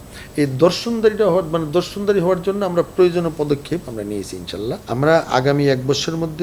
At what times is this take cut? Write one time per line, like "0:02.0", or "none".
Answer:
0:04.8